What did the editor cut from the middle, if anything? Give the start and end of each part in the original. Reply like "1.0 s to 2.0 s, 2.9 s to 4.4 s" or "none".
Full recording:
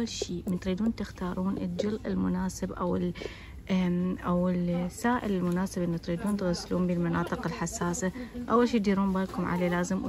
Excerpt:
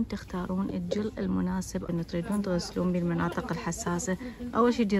2.8 s to 5.8 s